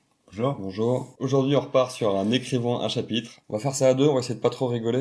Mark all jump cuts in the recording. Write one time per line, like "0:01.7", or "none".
0:01.1
0:03.3